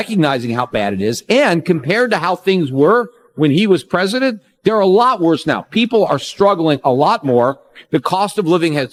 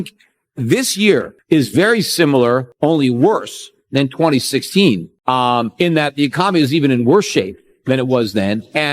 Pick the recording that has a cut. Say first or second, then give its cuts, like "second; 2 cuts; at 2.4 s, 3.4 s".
second; 2 cuts; at 1.3 s, 5.1 s